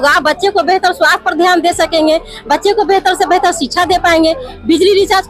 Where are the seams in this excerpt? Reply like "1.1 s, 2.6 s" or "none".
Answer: none